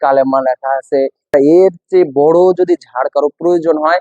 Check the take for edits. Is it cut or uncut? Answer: cut